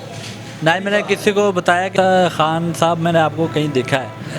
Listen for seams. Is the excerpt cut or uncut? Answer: cut